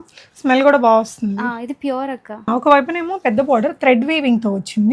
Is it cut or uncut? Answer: cut